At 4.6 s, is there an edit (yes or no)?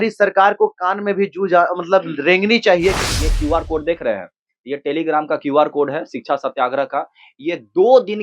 no